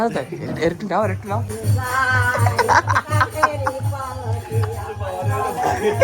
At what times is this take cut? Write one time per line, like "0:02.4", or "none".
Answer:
0:01.5